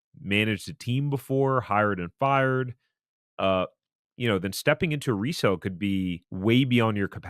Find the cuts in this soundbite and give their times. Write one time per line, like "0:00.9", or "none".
0:06.3